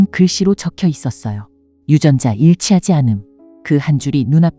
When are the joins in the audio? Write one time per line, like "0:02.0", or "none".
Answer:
none